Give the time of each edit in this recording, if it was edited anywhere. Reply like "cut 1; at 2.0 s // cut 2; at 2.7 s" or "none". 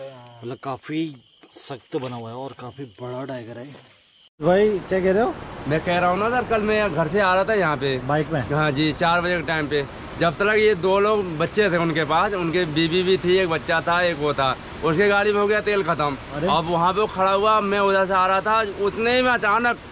cut 1; at 4.3 s